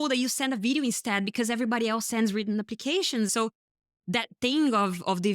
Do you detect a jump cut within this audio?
yes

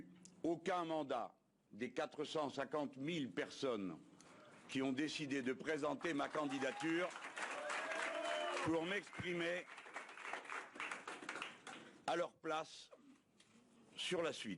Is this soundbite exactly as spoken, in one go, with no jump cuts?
yes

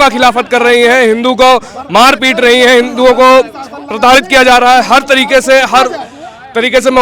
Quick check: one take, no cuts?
yes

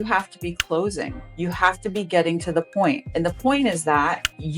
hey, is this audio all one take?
no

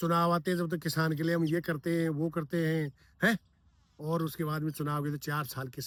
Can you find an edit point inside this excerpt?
no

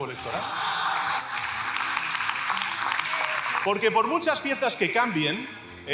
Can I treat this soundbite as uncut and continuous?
no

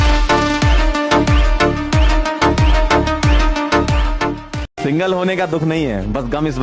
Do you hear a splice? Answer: no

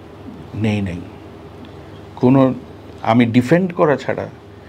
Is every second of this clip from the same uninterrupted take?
yes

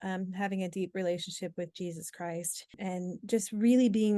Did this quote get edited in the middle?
yes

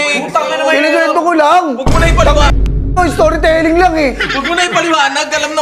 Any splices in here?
no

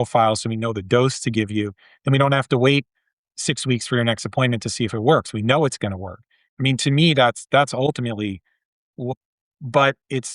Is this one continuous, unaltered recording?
no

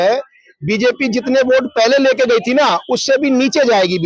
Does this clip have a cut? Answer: no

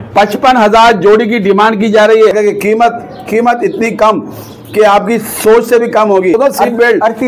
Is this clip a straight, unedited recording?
no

